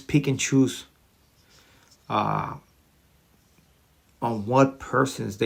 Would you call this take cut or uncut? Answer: uncut